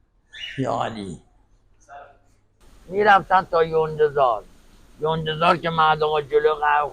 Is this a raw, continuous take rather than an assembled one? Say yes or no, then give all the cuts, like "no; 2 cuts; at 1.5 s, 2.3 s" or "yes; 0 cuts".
no; 1 cut; at 2.6 s